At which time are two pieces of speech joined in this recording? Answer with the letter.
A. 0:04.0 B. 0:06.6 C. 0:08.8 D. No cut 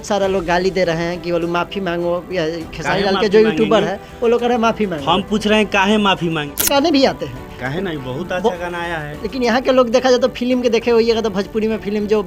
B